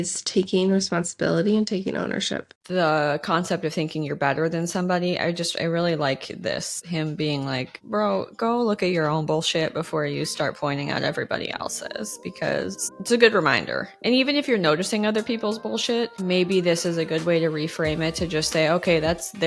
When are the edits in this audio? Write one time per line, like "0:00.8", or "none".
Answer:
0:02.6